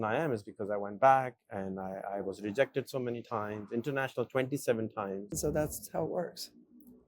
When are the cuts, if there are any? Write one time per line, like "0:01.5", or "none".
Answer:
0:05.3